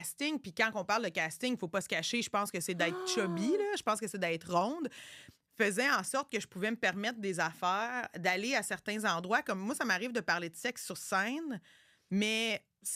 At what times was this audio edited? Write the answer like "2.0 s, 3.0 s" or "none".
none

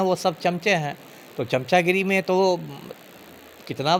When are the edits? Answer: none

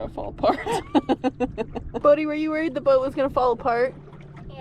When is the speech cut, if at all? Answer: 1.8 s

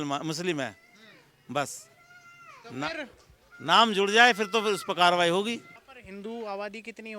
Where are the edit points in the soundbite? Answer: 5.8 s

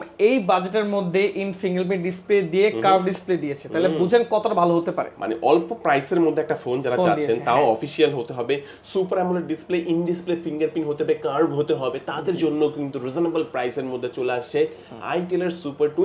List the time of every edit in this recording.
none

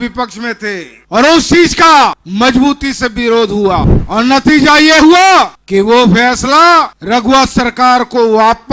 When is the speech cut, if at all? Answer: 0.9 s, 2.2 s, 4.0 s, 5.6 s, 7.0 s

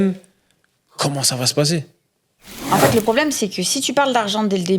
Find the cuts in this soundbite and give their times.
2.5 s

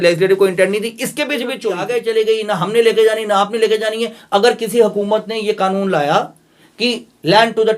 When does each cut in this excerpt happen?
1.9 s

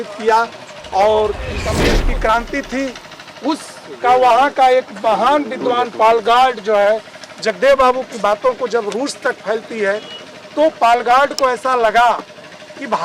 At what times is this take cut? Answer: 1.7 s

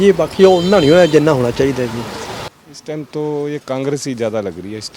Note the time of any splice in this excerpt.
2.4 s

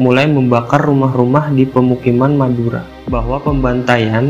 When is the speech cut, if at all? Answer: 3.0 s

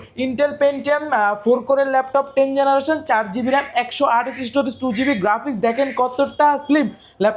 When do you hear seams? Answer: none

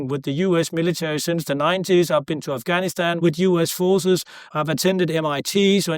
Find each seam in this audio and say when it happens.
3.2 s, 4.5 s

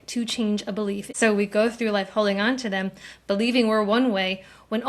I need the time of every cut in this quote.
1.1 s

